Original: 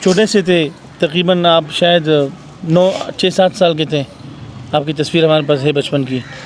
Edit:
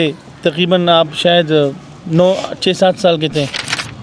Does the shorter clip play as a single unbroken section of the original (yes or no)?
yes